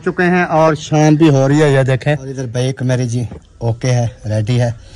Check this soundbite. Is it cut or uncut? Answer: cut